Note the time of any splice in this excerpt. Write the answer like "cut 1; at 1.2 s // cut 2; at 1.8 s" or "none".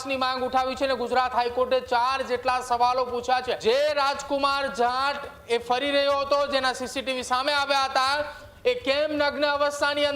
cut 1; at 3.6 s